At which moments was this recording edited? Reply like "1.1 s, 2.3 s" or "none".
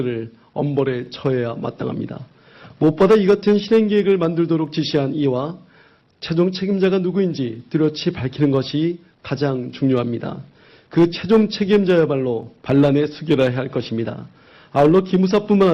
13.2 s

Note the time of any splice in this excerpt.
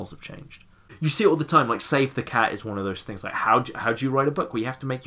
0.9 s

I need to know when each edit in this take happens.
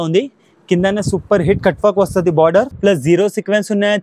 2.7 s

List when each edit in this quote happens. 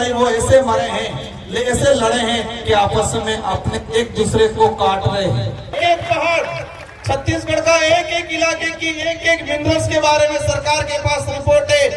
5.7 s

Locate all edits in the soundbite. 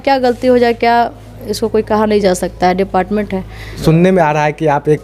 3.8 s

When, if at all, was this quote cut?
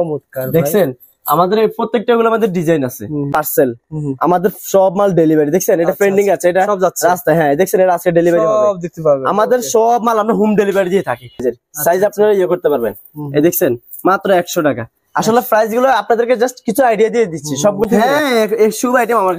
3.3 s, 11.4 s, 17.9 s

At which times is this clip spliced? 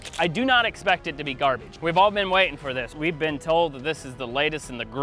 1.7 s, 2.9 s

